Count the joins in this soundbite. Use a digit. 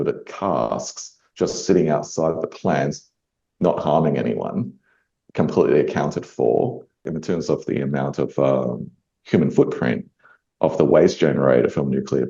1